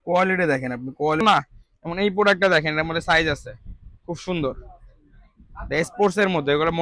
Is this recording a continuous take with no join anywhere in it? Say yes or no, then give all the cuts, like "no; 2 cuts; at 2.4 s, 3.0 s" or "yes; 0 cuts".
no; 1 cut; at 1.2 s